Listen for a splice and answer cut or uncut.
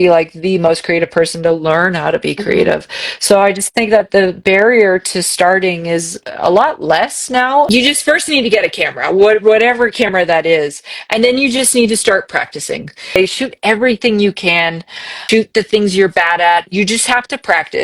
cut